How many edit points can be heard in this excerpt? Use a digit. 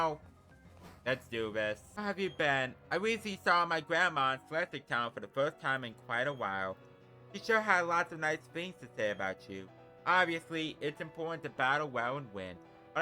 1